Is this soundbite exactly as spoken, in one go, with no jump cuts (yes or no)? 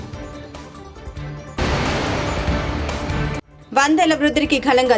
yes